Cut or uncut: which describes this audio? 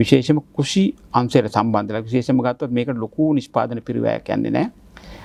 uncut